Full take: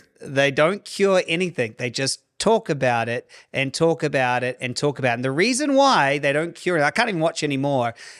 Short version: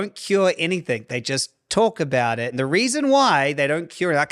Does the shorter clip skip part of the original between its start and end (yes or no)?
yes